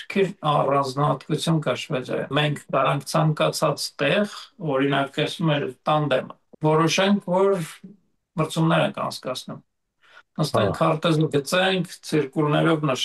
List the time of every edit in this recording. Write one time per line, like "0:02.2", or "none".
0:02.3
0:06.4